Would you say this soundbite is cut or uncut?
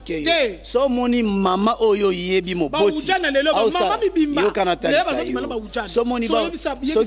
uncut